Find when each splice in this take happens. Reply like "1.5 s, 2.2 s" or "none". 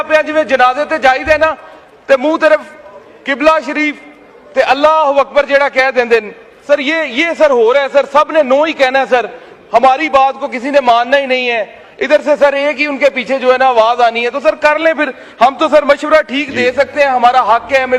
none